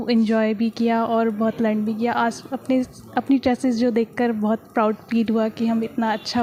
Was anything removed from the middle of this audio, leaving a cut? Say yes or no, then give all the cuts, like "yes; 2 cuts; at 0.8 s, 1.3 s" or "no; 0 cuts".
no; 0 cuts